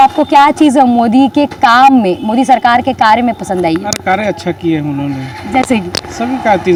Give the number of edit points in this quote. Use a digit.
0